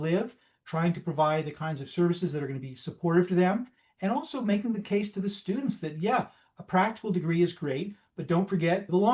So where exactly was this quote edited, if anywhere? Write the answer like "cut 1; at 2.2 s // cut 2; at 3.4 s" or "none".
none